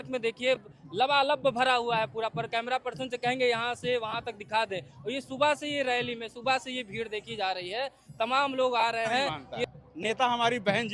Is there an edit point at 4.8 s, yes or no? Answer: no